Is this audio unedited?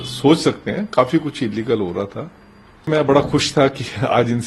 no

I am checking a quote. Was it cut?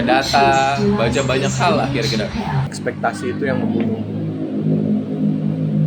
yes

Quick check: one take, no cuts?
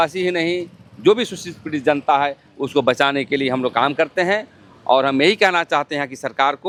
yes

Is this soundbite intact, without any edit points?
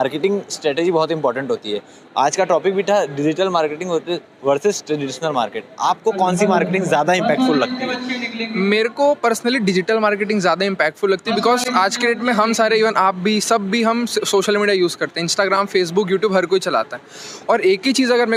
yes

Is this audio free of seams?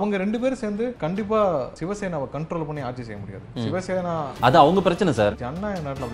no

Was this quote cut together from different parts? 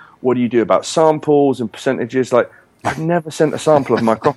no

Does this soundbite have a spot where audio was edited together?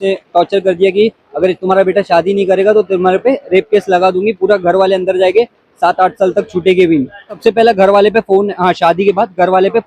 yes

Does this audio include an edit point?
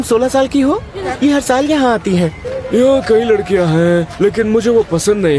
yes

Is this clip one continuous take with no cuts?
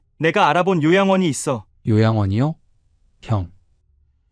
no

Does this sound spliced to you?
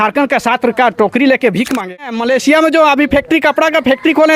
yes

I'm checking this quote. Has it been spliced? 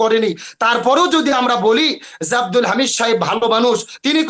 no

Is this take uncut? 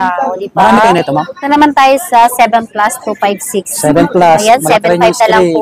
no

